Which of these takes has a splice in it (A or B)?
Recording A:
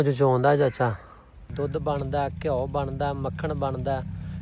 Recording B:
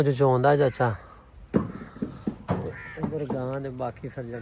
A